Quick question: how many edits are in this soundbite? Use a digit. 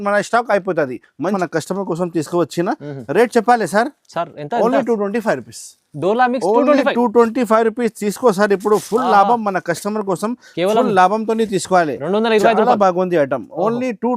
1